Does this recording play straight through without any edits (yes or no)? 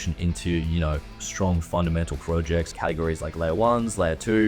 no